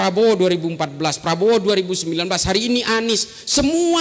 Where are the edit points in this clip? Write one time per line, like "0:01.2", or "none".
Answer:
none